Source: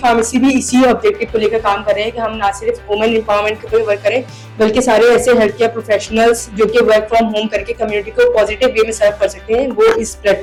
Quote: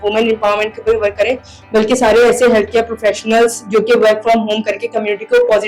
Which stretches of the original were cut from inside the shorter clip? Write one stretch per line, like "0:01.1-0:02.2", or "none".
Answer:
none

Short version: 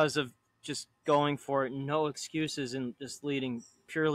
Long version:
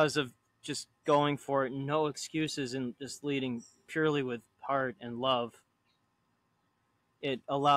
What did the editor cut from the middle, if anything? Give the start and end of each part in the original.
none

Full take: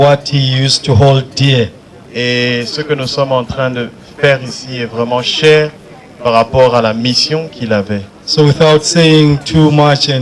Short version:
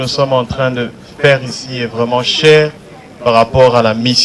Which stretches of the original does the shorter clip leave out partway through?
none

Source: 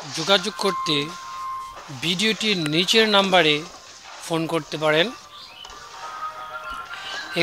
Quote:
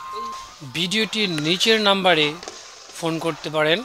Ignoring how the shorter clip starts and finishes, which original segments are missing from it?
none

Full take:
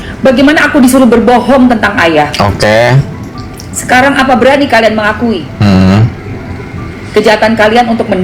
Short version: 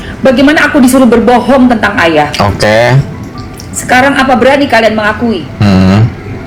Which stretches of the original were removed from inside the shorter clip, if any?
none

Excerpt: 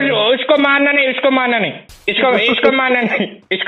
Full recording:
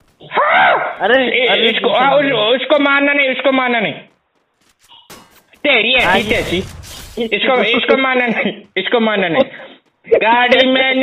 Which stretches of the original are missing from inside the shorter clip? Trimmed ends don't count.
0:04.3-0:07.3

